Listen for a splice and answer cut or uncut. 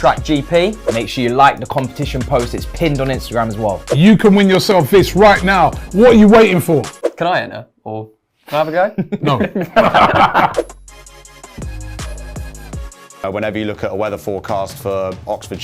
cut